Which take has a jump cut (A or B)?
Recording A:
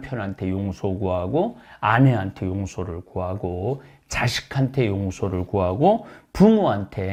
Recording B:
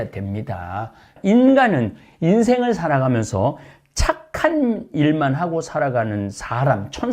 B